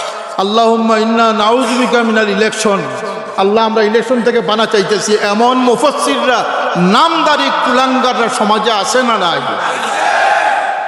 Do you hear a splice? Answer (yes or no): no